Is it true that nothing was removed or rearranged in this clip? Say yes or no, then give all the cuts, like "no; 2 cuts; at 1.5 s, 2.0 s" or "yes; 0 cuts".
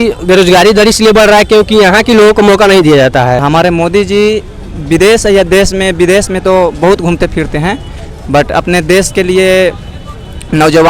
no; 1 cut; at 3.4 s